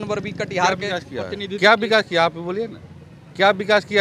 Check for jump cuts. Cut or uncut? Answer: uncut